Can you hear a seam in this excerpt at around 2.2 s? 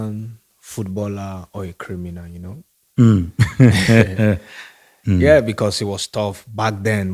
no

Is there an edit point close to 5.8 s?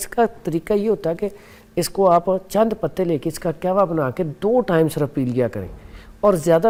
no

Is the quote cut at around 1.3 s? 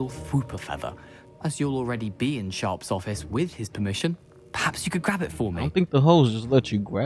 no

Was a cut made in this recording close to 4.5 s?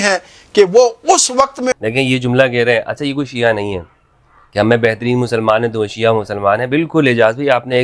no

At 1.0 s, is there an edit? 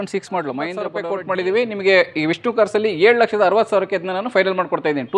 yes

